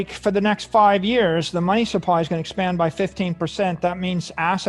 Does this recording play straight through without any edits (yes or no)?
yes